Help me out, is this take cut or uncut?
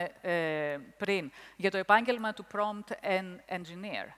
uncut